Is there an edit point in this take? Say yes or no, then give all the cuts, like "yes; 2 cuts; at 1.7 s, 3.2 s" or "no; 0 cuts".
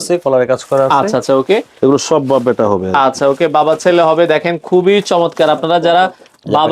no; 0 cuts